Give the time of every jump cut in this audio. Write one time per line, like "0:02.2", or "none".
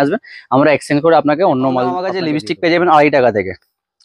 0:02.2

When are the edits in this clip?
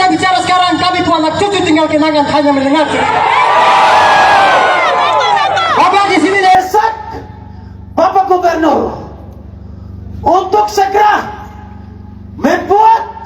0:06.6

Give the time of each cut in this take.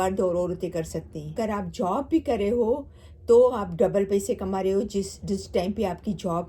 0:01.3

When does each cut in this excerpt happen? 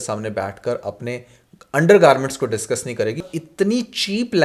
0:03.2

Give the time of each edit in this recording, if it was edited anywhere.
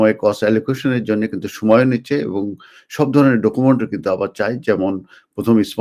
none

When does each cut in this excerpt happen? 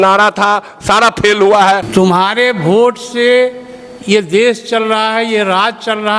0:01.9

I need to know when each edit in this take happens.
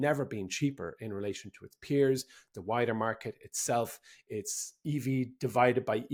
none

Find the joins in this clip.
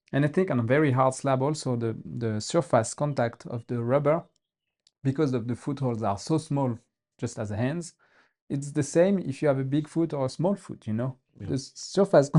none

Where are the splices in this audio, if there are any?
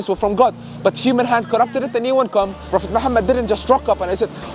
0:02.6

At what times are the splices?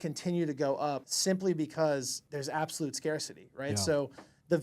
0:01.1
0:02.2

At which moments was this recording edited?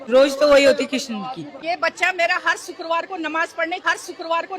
0:01.6

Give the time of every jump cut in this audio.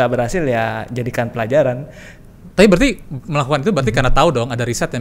none

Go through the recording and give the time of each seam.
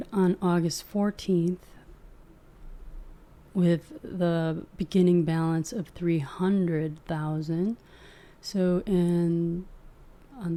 none

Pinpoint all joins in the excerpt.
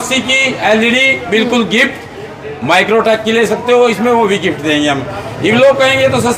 none

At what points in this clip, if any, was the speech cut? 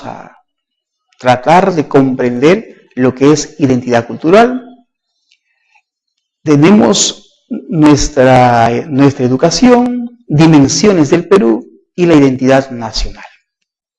0:04.1

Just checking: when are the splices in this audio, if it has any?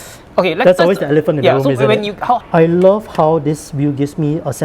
0:02.4

